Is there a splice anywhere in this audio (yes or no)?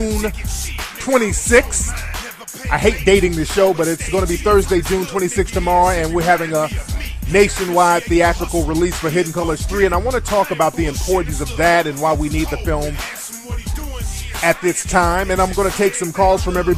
yes